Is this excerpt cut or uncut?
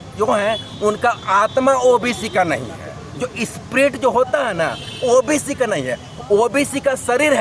uncut